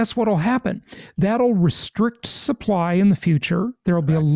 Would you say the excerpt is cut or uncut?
uncut